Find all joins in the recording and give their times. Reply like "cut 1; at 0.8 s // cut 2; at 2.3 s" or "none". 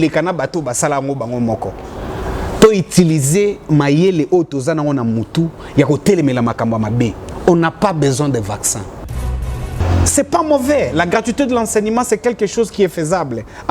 cut 1; at 9.5 s